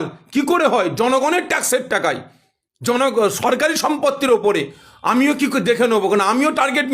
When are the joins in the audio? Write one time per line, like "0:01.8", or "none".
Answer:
none